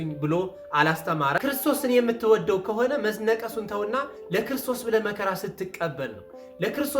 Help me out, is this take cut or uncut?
cut